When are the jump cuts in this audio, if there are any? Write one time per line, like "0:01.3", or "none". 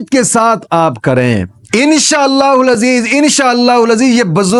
none